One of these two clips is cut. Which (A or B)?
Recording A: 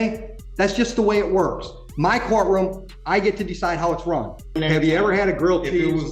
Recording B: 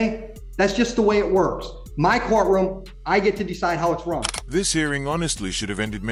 A